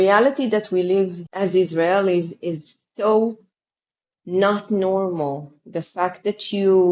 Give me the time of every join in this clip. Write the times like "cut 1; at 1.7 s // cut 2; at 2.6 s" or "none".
cut 1; at 1.2 s